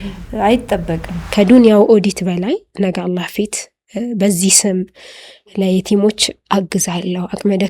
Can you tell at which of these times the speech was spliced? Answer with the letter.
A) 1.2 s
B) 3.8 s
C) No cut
A